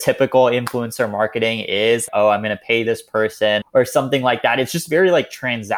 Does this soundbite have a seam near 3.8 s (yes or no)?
yes